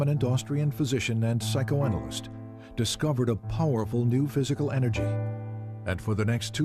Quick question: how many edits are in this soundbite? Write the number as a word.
one